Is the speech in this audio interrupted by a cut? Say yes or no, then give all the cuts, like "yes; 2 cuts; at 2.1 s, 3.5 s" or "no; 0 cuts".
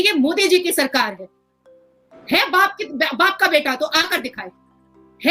no; 0 cuts